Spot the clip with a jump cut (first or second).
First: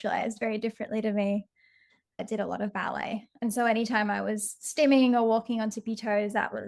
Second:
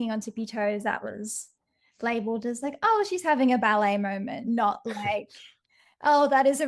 first